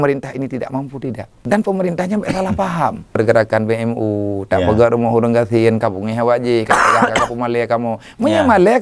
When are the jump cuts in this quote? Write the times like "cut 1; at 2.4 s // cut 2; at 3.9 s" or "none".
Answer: cut 1; at 1.3 s // cut 2; at 3.2 s